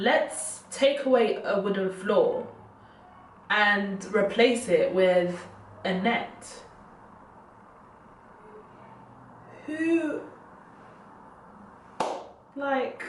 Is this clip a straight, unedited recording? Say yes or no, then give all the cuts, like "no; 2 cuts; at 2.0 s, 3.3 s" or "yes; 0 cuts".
yes; 0 cuts